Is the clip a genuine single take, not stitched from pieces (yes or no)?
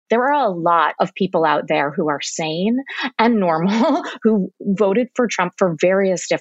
no